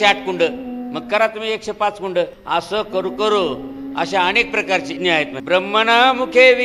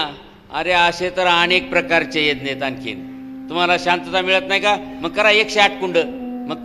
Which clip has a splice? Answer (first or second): first